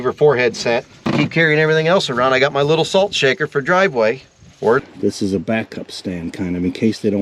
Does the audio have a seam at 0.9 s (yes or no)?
yes